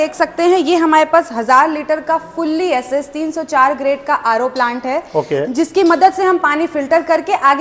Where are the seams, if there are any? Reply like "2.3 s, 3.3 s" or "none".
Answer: none